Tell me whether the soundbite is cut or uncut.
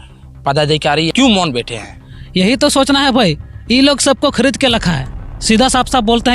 cut